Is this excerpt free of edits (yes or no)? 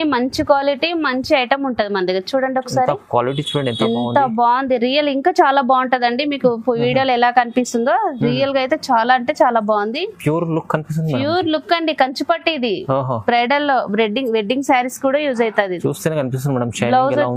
yes